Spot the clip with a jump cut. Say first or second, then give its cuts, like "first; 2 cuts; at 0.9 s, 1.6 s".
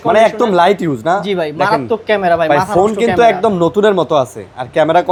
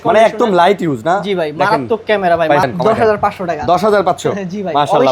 second; 1 cut; at 2.7 s